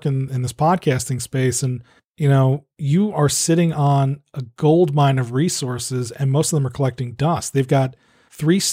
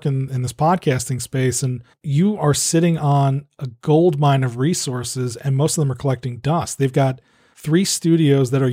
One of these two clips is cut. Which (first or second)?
second